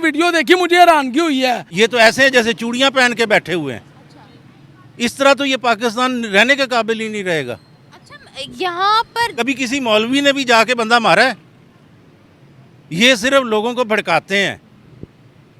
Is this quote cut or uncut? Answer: cut